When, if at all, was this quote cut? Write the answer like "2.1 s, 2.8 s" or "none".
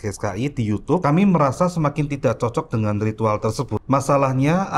1.0 s, 3.8 s